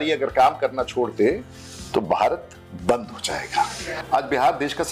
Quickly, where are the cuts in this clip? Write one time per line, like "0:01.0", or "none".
0:04.0